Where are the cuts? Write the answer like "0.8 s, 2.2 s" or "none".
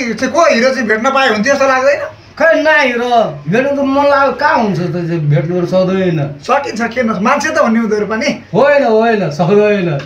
none